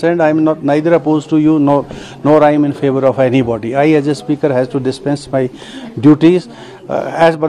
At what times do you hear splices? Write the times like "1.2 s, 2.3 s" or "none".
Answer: none

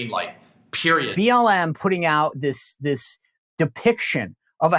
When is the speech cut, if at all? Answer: 1.1 s

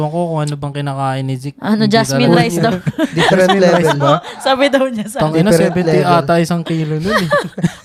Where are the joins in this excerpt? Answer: none

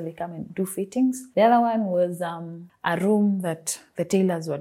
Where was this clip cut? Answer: none

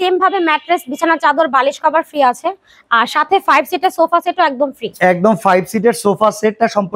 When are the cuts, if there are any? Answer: none

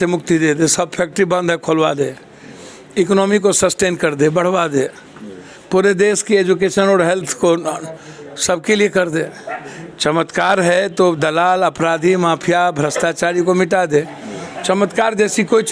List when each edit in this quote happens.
none

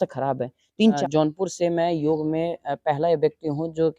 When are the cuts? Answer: 1.0 s

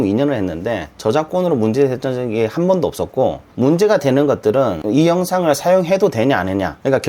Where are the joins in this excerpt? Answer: none

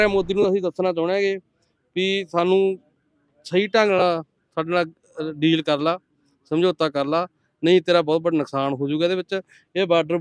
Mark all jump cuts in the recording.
none

